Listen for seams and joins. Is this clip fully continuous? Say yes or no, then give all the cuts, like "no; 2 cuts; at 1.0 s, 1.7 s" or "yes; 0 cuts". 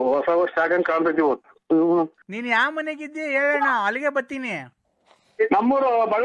no; 1 cut; at 2.3 s